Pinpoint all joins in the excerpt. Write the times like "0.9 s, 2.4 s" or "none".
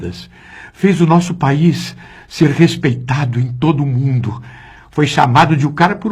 none